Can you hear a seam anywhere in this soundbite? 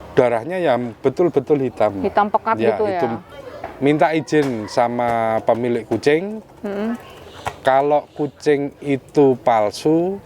yes; 1 cut; at 3.3 s

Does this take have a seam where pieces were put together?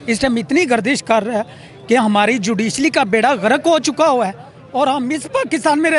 no; 0 cuts

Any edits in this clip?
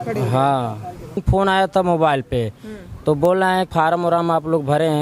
yes; 2 cuts; at 1.2 s, 3.7 s

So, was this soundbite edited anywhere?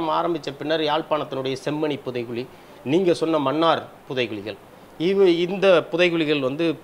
no; 0 cuts

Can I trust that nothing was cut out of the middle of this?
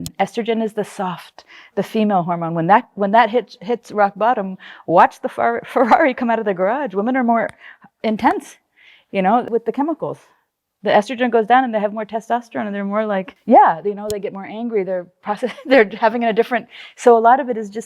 no; 2 cuts; at 9.5 s, 13.3 s

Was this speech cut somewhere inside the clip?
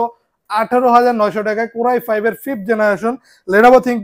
no; 0 cuts

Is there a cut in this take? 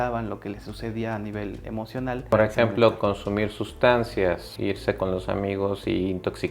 yes; 1 cut; at 2.3 s

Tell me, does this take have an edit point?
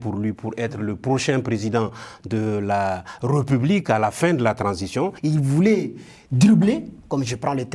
yes; 1 cut; at 5.2 s

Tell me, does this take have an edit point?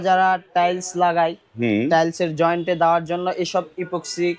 no; 0 cuts

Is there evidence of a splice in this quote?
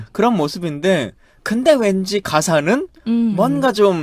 yes; 1 cut; at 1.8 s

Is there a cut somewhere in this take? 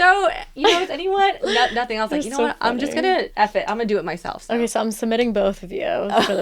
yes; 1 cut; at 3.3 s

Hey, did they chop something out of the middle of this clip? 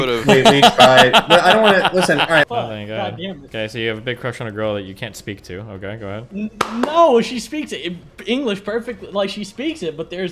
yes; 1 cut; at 2.5 s

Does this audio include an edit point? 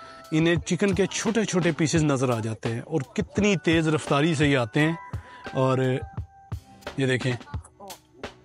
no; 0 cuts

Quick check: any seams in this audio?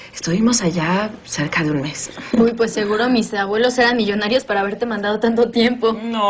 no; 0 cuts

